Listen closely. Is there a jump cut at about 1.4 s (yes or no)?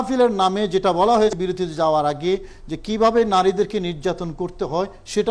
yes